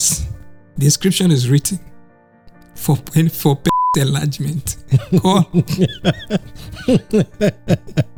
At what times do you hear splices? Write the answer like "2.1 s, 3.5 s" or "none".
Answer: none

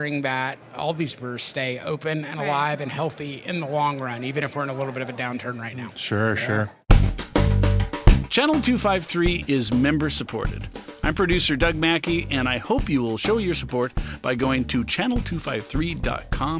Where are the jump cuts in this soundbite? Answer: 6.8 s

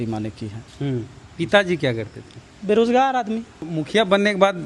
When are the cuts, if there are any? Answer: 3.6 s

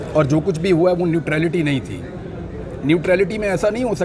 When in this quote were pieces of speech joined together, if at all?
none

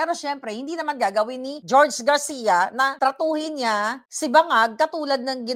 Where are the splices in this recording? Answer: none

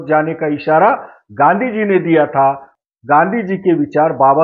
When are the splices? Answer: 2.7 s

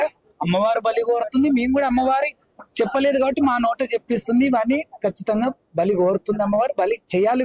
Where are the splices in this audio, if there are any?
none

